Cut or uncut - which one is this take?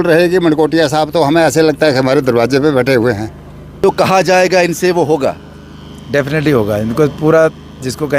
cut